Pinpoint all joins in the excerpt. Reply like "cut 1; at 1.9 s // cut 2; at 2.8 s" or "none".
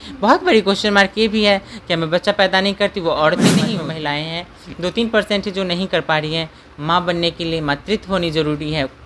cut 1; at 3.7 s